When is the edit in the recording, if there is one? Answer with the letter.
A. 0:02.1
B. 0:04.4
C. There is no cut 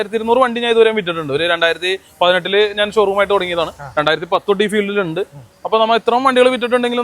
C